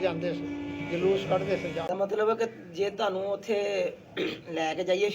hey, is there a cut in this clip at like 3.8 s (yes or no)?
no